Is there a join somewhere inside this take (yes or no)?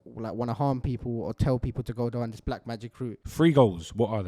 yes